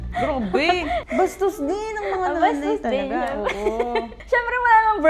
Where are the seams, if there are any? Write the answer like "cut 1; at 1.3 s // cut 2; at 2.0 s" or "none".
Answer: cut 1; at 1.0 s // cut 2; at 4.2 s